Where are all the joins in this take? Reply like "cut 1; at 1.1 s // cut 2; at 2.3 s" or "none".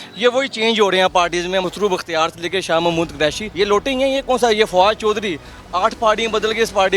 cut 1; at 1.6 s // cut 2; at 3.4 s